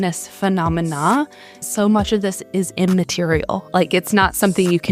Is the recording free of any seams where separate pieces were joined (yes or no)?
no